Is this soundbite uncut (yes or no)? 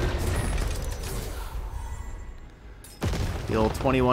yes